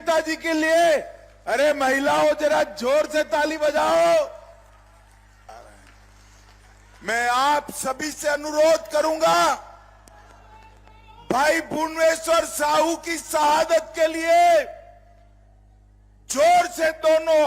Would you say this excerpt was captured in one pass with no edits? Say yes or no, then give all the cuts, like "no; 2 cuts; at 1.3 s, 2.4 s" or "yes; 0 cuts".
no; 1 cut; at 5.5 s